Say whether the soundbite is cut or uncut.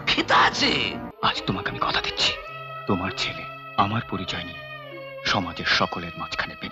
cut